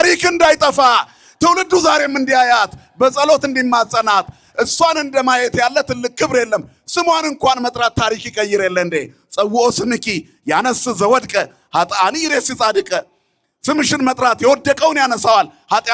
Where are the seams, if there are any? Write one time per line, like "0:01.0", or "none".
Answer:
none